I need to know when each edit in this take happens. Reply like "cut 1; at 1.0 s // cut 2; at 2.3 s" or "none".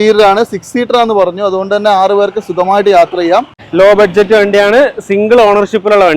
cut 1; at 3.6 s